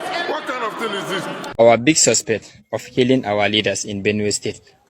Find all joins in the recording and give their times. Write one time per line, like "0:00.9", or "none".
0:01.5